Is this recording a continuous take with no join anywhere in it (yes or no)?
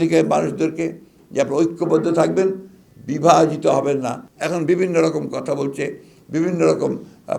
no